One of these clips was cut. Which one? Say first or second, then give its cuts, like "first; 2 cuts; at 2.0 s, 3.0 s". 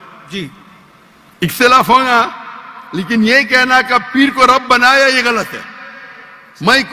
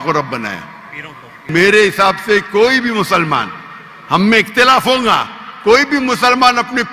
second; 1 cut; at 1.4 s